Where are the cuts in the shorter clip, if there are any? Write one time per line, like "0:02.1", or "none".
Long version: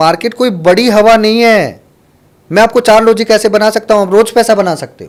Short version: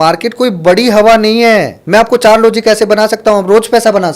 0:01.8